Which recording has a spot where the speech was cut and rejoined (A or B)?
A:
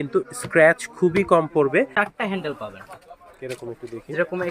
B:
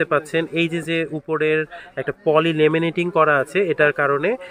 A